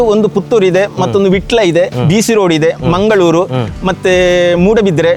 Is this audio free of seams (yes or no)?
yes